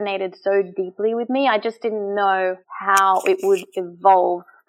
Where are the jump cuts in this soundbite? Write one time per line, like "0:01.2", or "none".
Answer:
0:02.7